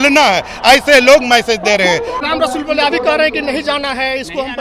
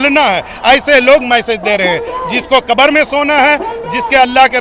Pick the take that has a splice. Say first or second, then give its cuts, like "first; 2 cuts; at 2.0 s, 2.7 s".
first; 1 cut; at 2.2 s